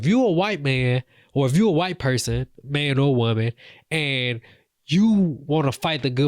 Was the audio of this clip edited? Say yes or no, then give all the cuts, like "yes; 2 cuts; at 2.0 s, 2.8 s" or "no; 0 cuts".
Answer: no; 0 cuts